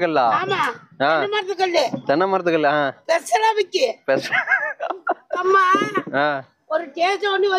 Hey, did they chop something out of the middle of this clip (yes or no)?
yes